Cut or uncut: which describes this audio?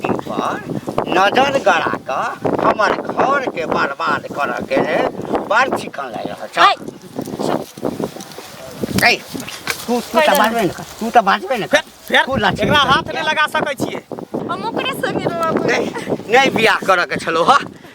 cut